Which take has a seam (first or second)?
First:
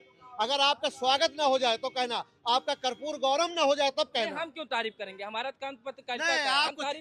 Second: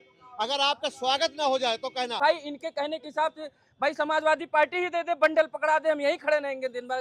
second